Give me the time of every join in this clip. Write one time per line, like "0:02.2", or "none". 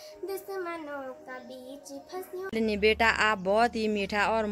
0:02.5